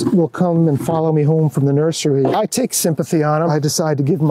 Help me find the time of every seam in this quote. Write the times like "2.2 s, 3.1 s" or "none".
2.3 s, 3.5 s